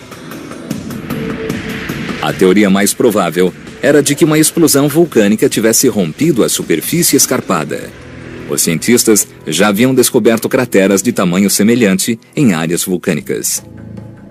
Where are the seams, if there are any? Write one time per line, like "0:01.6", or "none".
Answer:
none